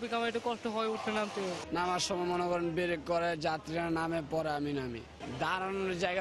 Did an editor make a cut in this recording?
no; 0 cuts

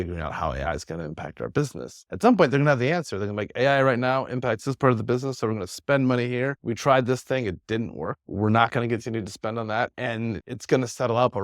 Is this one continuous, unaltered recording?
no; 2 cuts; at 8.3 s, 9.9 s

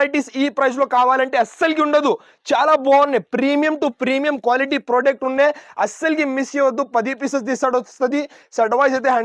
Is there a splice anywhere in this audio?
no; 0 cuts

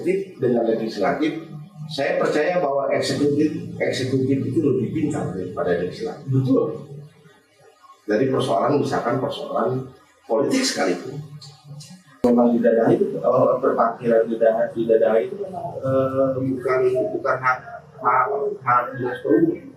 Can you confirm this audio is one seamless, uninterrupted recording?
no; 1 cut; at 12.2 s

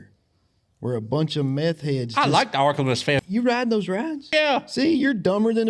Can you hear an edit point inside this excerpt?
yes; 2 cuts; at 3.2 s, 4.3 s

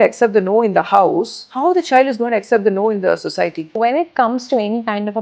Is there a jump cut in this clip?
yes; 2 cuts; at 1.4 s, 3.6 s

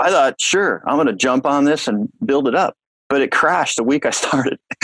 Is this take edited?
no; 0 cuts

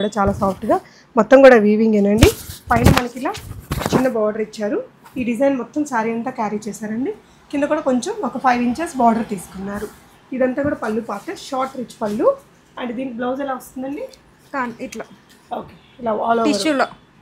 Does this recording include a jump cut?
no; 0 cuts

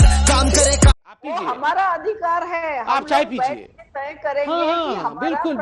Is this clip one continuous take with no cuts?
no; 1 cut; at 1.4 s

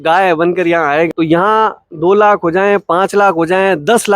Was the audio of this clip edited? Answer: yes; 1 cut; at 1.1 s

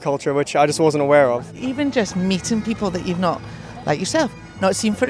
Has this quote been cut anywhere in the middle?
yes; 1 cut; at 1.6 s

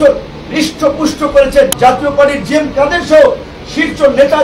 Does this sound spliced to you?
yes; 1 cut; at 1.7 s

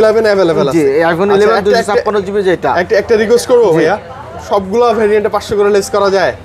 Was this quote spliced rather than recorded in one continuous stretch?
no; 0 cuts

